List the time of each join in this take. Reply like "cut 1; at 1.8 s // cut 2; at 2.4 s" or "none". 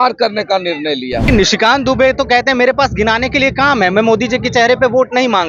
cut 1; at 1.2 s